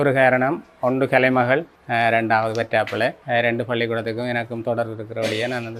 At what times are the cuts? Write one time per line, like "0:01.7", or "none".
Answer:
0:01.8
0:03.2